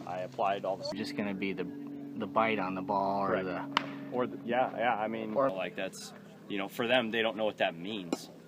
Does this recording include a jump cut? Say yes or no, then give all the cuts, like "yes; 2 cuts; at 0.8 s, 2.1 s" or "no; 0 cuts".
yes; 2 cuts; at 0.9 s, 5.5 s